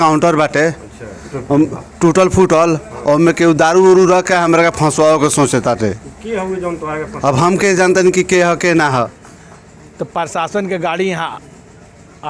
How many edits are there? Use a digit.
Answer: 1